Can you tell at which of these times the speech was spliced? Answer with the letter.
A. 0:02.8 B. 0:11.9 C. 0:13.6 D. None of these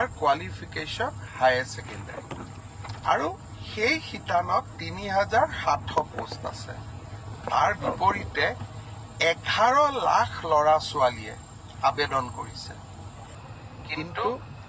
C